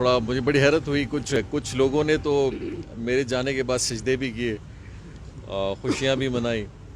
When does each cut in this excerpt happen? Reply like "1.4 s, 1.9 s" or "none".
1.4 s